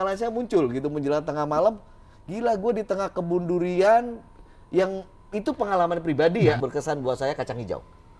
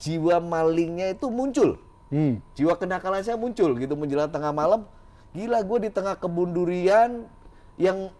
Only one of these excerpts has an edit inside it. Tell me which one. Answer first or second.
first